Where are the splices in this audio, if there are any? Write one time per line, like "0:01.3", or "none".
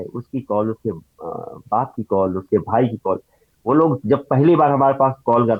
none